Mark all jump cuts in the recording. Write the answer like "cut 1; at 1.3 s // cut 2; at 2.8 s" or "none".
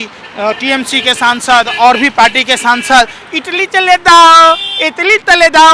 none